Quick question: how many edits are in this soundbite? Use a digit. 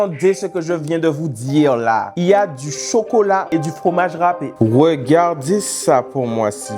1